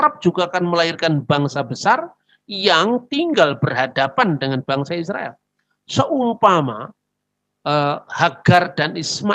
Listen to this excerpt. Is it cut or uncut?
uncut